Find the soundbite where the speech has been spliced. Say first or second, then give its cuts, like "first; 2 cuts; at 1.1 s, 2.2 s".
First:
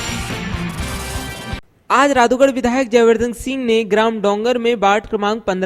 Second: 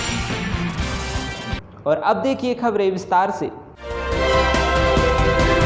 first; 1 cut; at 1.7 s